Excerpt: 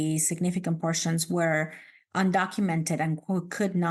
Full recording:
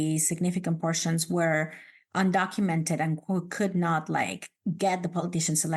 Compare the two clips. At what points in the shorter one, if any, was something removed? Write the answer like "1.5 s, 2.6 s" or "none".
none